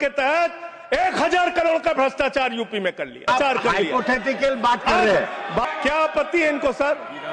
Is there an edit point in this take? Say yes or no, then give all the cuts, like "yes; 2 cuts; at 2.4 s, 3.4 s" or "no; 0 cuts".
yes; 2 cuts; at 3.3 s, 5.7 s